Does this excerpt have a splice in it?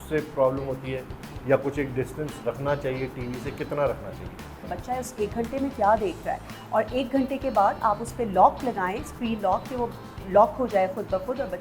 yes; 1 cut; at 4.7 s

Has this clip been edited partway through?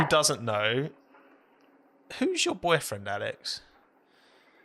no; 0 cuts

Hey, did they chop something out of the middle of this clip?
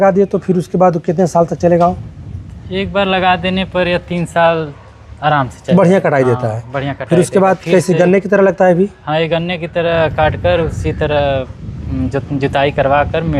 no; 0 cuts

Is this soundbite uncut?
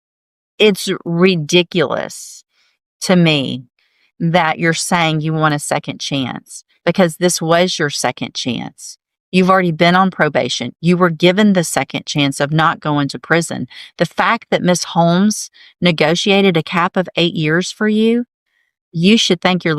yes; 0 cuts

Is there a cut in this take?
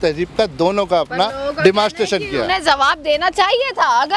no; 0 cuts

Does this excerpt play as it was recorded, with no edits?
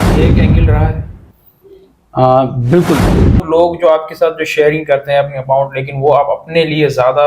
no; 1 cut; at 3.5 s

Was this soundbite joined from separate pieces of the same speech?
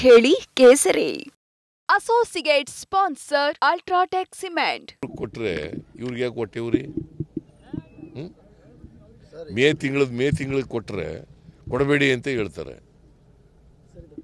yes; 1 cut; at 4.9 s

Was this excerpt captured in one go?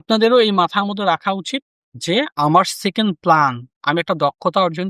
yes; 0 cuts

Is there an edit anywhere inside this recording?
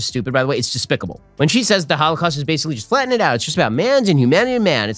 no; 0 cuts

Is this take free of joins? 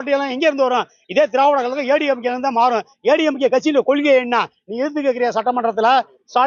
yes; 0 cuts

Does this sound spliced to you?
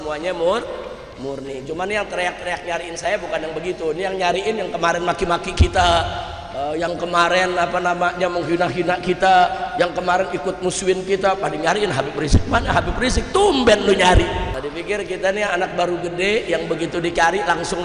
yes; 1 cut; at 14.5 s

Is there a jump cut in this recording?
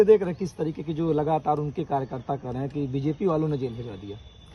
no; 0 cuts

